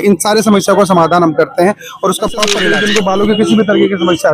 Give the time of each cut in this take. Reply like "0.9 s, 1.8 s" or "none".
2.6 s